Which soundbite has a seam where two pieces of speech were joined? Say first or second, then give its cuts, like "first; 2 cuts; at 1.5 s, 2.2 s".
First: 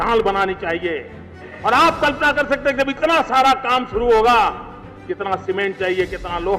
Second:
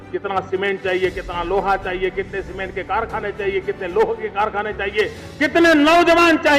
first; 1 cut; at 1.5 s